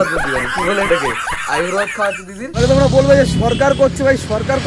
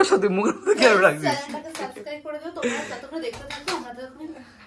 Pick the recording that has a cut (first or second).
first